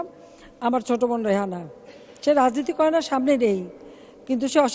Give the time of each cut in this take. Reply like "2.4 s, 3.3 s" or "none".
none